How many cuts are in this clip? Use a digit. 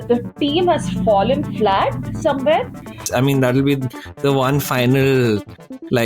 1